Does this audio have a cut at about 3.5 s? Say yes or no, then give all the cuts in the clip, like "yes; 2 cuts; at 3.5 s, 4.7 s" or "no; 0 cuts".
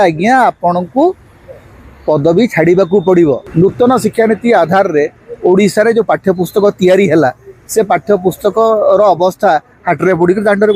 yes; 1 cut; at 3.5 s